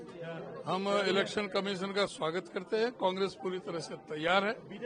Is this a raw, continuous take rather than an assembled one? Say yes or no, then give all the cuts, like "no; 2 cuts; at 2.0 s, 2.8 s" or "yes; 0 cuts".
yes; 0 cuts